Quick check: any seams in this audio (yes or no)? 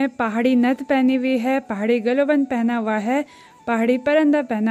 no